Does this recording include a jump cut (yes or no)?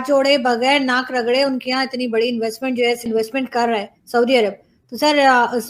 yes